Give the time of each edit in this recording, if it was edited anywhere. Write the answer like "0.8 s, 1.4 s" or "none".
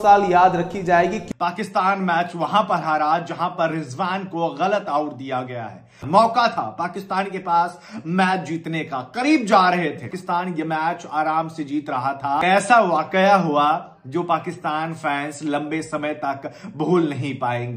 1.2 s, 6.0 s, 10.1 s, 12.4 s